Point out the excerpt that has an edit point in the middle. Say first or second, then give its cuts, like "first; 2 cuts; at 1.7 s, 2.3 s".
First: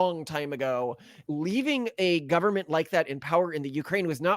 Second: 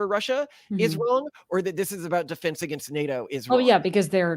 first; 1 cut; at 1.1 s